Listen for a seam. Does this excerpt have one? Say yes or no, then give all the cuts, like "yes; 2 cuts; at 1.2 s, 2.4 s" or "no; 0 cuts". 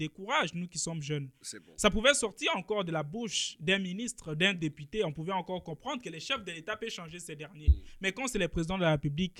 no; 0 cuts